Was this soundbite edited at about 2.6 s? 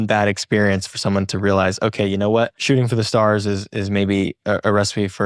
yes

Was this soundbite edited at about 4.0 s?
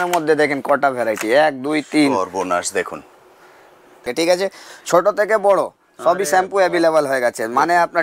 yes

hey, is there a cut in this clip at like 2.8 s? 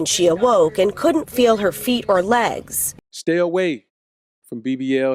yes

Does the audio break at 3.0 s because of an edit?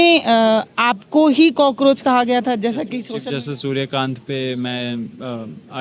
yes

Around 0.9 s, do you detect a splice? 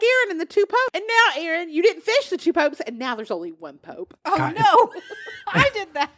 yes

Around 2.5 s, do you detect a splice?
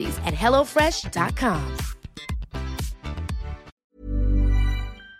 no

